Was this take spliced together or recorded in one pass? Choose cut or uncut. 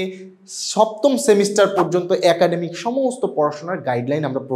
uncut